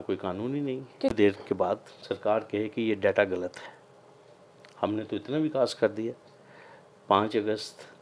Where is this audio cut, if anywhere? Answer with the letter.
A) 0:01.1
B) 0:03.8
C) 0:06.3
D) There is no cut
A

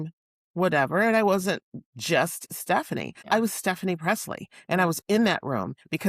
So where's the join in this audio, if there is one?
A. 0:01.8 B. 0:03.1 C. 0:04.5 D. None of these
B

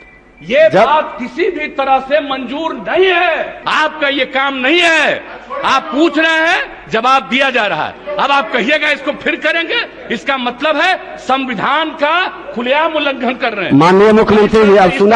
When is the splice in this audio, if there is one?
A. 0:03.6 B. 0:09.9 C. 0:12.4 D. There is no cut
A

